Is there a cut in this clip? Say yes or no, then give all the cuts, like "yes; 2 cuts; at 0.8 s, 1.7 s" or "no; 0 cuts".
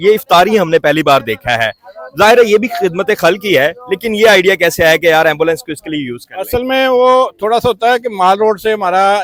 no; 0 cuts